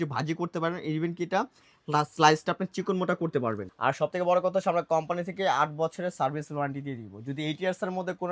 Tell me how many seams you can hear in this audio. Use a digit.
1